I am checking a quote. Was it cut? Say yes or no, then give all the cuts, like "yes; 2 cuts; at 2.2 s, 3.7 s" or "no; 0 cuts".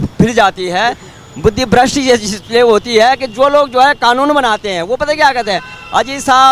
no; 0 cuts